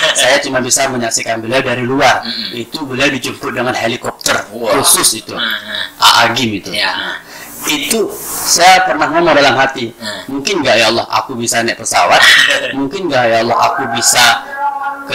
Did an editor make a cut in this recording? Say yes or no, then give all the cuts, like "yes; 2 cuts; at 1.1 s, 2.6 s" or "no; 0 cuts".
no; 0 cuts